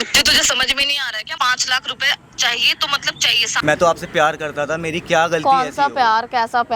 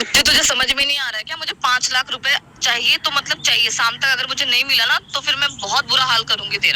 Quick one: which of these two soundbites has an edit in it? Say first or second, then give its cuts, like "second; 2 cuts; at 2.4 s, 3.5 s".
first; 2 cuts; at 1.3 s, 3.5 s